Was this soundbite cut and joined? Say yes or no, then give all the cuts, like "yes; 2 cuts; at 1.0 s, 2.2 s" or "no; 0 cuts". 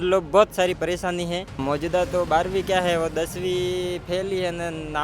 yes; 1 cut; at 1.6 s